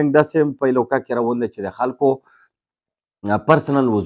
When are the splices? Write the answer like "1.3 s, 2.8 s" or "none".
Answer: none